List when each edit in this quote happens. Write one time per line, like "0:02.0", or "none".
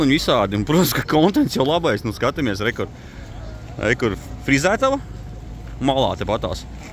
none